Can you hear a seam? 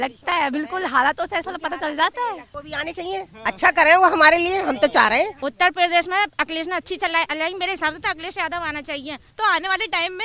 yes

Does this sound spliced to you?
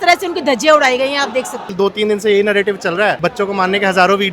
yes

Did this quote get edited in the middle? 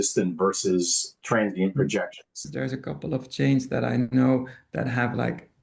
yes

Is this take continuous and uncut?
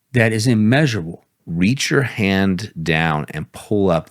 no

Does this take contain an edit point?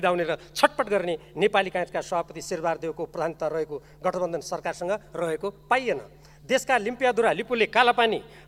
no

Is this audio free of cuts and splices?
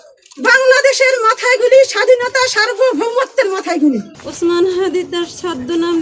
no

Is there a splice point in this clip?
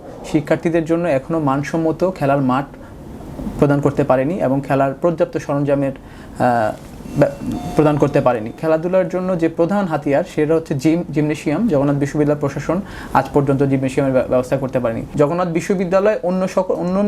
yes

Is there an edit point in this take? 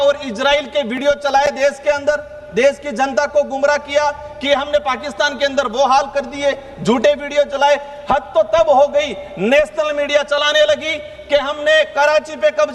no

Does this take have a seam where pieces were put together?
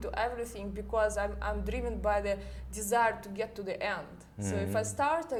no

